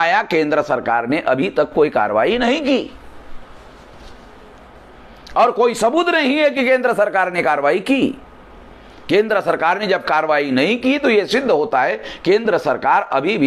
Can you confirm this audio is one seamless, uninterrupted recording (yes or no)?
yes